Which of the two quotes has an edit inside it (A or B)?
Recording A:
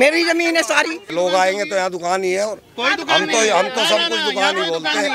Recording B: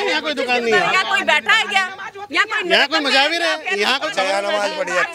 A